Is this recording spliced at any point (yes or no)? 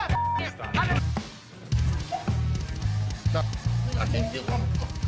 yes